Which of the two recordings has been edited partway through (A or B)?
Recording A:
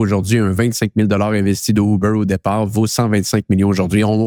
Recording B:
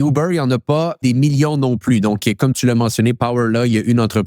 B